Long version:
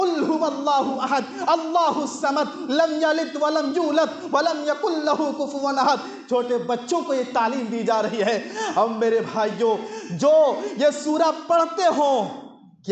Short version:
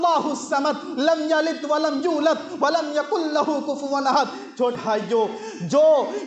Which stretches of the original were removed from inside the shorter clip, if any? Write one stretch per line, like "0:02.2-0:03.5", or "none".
0:06.5-0:09.2